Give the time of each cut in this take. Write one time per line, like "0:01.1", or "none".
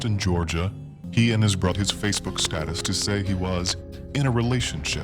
0:00.9
0:01.7

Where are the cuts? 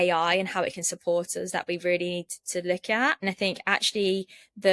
0:03.2

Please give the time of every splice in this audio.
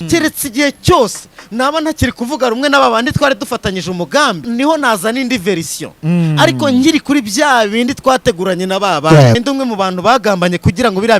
0:04.4
0:09.4

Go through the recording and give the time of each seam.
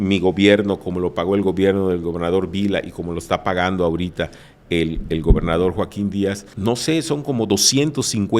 0:06.5

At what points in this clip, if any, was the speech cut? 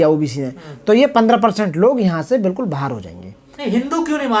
none

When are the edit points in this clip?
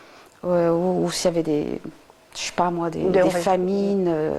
none

